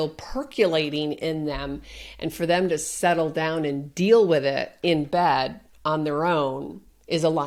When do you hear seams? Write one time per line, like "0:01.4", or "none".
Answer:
none